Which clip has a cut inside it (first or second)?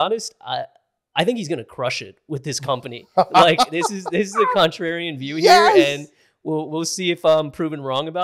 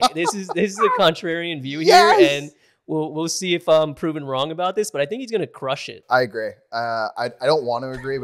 second